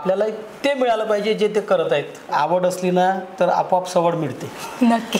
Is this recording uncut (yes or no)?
no